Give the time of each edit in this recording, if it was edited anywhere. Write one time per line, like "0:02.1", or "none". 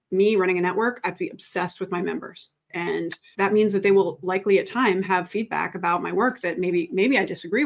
none

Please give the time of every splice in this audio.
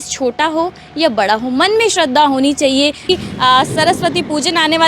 0:03.1

